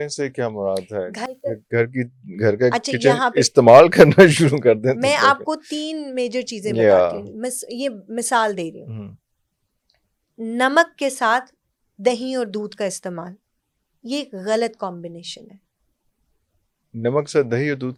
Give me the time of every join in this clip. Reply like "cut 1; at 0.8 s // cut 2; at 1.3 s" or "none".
none